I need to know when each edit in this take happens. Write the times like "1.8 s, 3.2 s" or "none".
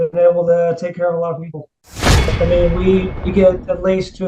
2.3 s